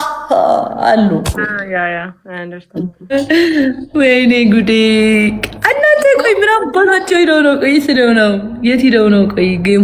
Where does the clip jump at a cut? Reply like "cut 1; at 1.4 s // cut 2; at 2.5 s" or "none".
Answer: cut 1; at 3.1 s